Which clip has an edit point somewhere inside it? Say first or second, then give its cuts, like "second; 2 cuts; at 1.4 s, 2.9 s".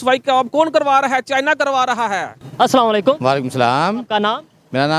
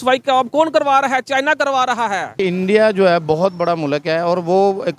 second; 1 cut; at 2.4 s